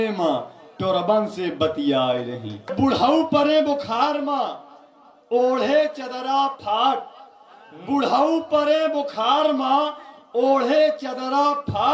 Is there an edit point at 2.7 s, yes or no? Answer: yes